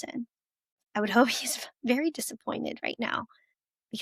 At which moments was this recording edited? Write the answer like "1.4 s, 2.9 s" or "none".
0.9 s